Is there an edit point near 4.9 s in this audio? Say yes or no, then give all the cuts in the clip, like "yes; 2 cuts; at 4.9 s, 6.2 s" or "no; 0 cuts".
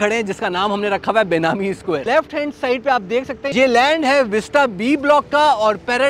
no; 2 cuts; at 2.0 s, 3.4 s